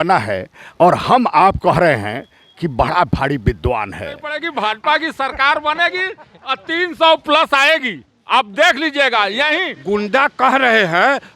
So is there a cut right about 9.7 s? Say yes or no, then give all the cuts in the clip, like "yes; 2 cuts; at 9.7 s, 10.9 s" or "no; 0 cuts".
yes; 2 cuts; at 4.4 s, 9.7 s